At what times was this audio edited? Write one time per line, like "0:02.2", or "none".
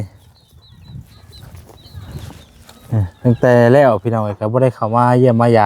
none